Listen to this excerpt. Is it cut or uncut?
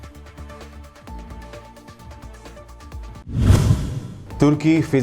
cut